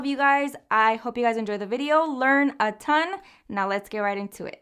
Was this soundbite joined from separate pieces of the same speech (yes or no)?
no